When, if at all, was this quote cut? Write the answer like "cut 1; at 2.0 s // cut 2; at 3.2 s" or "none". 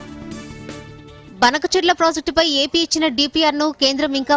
none